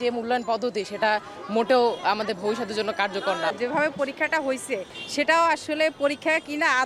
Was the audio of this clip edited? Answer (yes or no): yes